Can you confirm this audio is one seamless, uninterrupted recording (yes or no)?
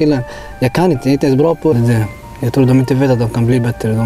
no